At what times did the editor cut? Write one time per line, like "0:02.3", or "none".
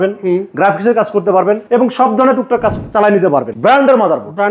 0:01.6
0:03.5